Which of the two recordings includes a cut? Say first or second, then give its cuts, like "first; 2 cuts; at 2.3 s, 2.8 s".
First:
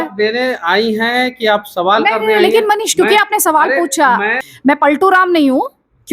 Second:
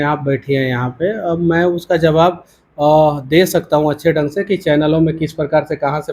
first; 1 cut; at 4.4 s